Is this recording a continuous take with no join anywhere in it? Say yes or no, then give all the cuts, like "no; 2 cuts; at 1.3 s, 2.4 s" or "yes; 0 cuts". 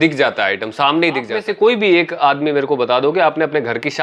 no; 1 cut; at 1.5 s